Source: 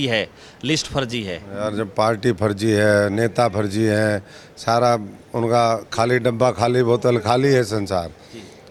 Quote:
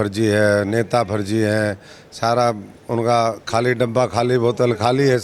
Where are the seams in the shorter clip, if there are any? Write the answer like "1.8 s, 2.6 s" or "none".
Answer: none